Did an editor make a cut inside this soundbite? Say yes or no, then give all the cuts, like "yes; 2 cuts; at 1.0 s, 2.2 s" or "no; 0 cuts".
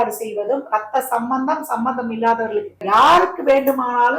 yes; 1 cut; at 2.8 s